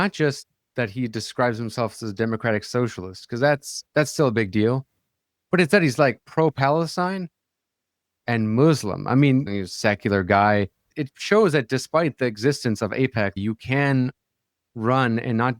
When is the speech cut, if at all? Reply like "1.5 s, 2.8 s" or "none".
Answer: 3.8 s, 9.5 s, 11.0 s, 13.4 s